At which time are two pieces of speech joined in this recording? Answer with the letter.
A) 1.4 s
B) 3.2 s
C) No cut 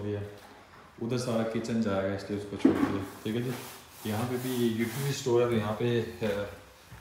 C